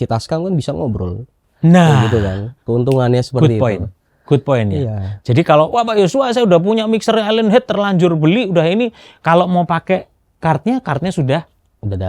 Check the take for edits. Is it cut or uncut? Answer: uncut